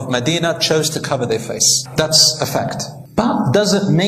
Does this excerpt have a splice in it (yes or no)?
no